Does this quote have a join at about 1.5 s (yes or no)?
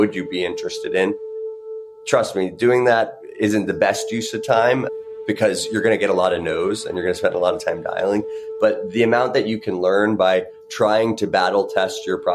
yes